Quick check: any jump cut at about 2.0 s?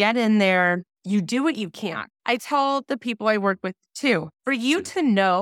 yes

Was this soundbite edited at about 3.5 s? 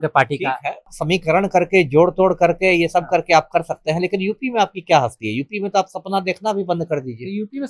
no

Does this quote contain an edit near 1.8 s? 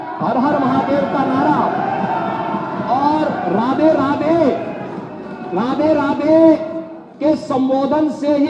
no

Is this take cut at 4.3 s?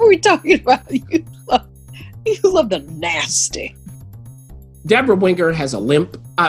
yes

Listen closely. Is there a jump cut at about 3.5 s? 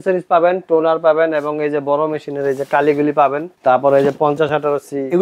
yes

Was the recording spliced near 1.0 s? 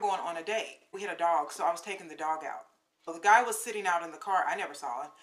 yes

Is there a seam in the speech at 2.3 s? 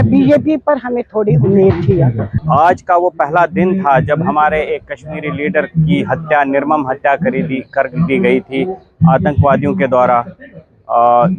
yes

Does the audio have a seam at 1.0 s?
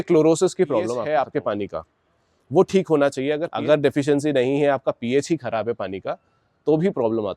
yes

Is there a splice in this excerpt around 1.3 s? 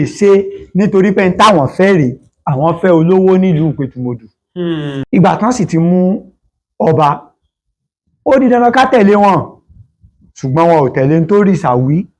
no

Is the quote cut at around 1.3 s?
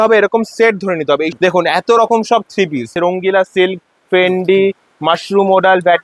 yes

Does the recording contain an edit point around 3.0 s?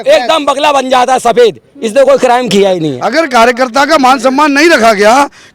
yes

